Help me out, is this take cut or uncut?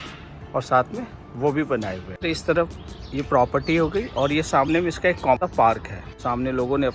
cut